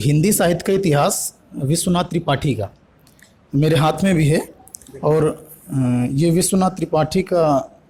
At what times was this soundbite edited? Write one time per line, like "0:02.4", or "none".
none

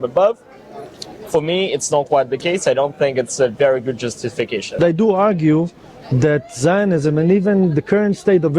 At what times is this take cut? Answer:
0:04.8

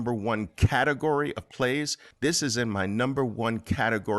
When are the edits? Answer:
0:02.0

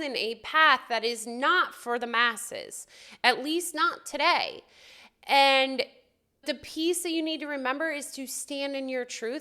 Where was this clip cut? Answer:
0:06.5

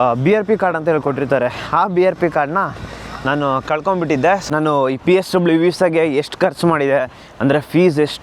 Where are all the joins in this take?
0:04.4

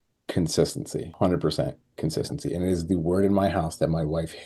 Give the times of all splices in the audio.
0:01.1

